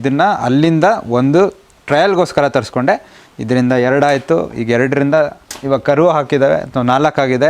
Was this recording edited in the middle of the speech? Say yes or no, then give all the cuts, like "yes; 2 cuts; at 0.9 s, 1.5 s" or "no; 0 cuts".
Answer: no; 0 cuts